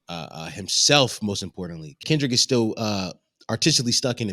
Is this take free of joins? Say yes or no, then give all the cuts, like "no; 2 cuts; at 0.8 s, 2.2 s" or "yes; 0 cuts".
no; 1 cut; at 2.0 s